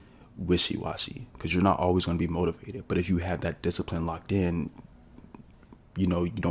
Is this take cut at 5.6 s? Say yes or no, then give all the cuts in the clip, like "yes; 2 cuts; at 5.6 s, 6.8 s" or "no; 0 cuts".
no; 0 cuts